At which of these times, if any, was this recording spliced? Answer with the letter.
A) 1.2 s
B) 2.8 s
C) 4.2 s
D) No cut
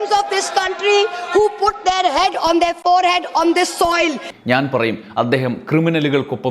C